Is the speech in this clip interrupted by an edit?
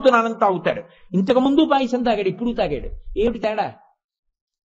no; 0 cuts

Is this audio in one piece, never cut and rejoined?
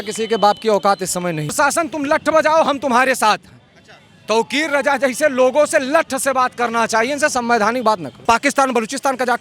no; 2 cuts; at 1.5 s, 8.1 s

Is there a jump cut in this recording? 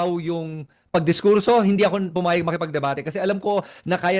no; 0 cuts

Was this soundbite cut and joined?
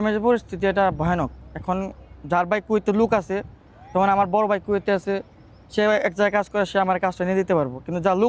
no; 0 cuts

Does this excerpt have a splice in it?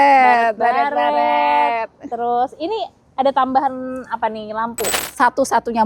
yes; 1 cut; at 4.9 s

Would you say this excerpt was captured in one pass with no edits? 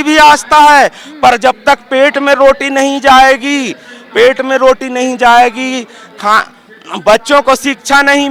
yes; 0 cuts

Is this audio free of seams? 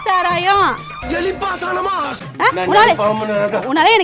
no; 1 cut; at 2.1 s

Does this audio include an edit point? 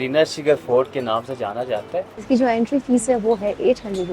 yes; 1 cut; at 2.1 s

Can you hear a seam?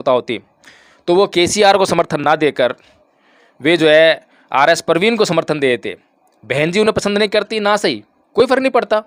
no; 0 cuts

